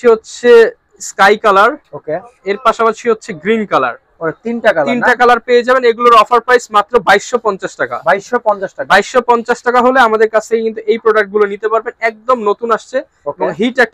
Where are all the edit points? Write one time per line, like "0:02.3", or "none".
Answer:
none